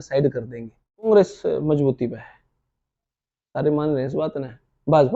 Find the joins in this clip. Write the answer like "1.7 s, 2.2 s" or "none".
1.1 s